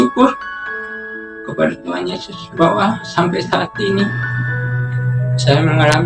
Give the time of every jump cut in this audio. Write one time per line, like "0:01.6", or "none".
none